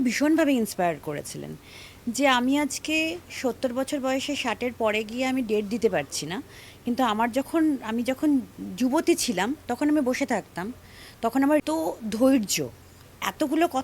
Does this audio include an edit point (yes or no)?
yes